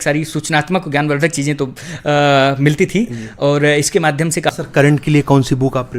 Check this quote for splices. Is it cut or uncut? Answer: cut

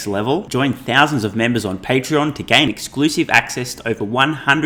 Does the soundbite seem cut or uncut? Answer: uncut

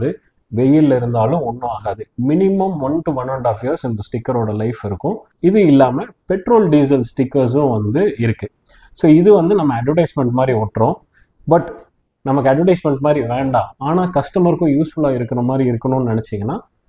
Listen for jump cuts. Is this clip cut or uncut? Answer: cut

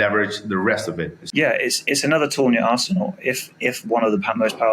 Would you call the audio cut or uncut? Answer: cut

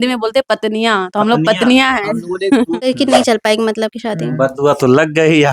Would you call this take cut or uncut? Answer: cut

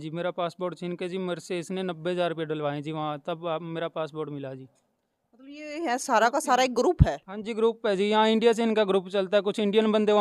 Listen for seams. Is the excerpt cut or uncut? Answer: uncut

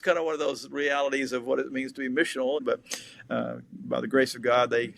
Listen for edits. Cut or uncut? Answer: cut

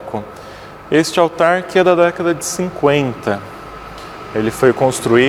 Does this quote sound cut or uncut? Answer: uncut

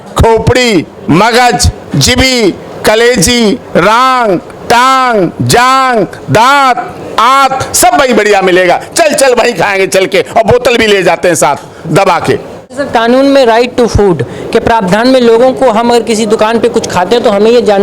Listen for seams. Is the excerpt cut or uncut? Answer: cut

